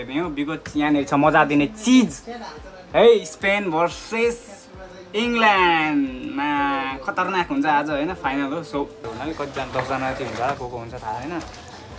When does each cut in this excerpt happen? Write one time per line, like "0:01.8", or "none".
0:09.1